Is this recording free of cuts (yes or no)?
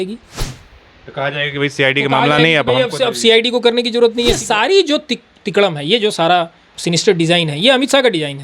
no